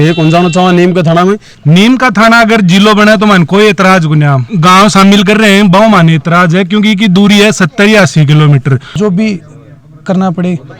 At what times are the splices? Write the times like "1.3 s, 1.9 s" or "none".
1.5 s, 4.5 s, 8.9 s